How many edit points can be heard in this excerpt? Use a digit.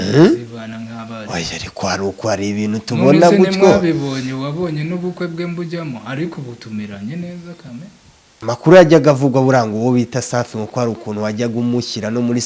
1